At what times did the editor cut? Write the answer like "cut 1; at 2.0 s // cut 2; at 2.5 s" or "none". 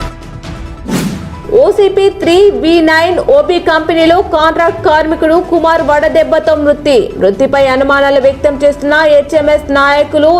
cut 1; at 1.0 s